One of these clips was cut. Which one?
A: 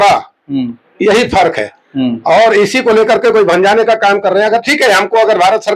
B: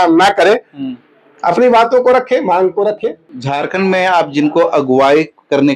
B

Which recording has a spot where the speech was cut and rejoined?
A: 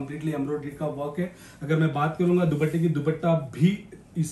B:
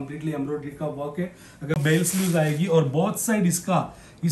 B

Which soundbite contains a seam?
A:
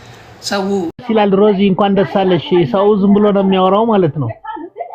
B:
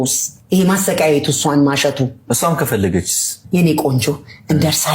A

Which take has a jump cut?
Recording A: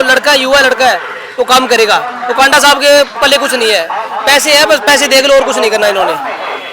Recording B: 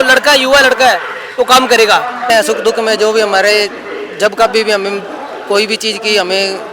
B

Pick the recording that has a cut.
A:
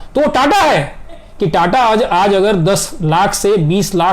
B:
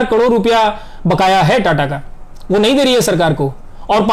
A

